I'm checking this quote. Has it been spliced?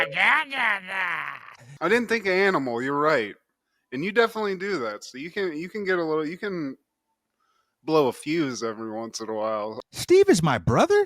yes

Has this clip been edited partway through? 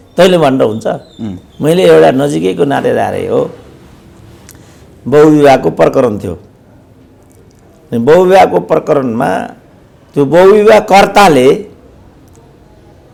no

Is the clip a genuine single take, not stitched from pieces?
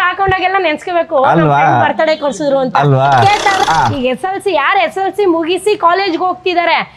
no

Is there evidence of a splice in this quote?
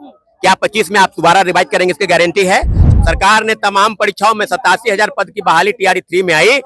yes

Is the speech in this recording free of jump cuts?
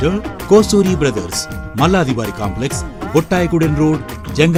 yes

